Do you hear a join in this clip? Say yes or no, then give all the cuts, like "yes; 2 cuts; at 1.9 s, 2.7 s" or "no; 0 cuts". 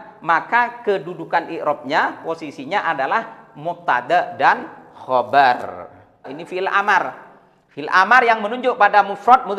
yes; 1 cut; at 6.3 s